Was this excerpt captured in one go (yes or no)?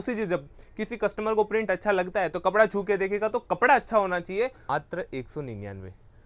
no